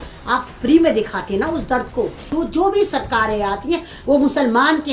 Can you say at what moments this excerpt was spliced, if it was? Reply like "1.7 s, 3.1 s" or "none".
2.3 s